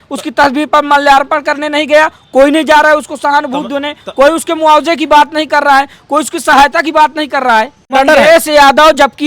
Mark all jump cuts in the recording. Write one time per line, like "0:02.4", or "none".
0:07.9